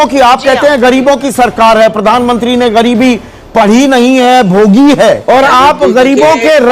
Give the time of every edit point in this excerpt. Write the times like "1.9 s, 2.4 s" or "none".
5.2 s